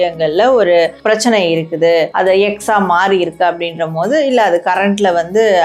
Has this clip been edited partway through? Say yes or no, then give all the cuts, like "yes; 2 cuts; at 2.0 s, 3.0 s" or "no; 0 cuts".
yes; 2 cuts; at 1.0 s, 2.1 s